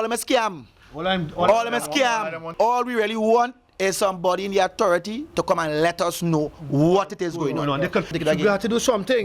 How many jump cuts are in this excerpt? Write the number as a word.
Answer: two